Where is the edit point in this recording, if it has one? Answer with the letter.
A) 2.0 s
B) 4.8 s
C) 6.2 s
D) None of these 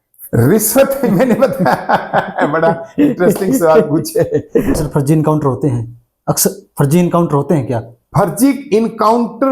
B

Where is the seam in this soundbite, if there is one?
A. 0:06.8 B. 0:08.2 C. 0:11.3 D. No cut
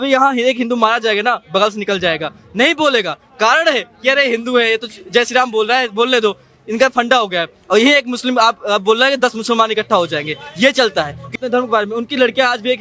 C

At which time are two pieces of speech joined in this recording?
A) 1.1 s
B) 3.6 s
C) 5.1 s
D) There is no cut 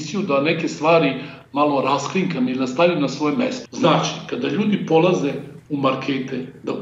B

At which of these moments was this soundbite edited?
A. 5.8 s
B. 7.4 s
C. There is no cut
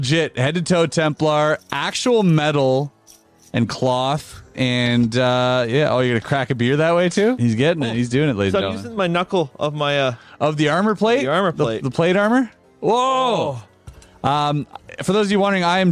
B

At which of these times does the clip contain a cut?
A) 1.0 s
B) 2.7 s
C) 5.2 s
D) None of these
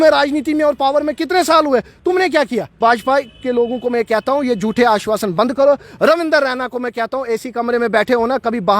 B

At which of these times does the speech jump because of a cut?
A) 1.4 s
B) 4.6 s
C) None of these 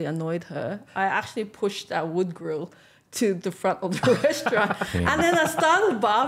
C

